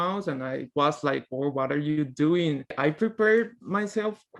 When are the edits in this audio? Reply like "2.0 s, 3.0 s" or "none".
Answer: 2.8 s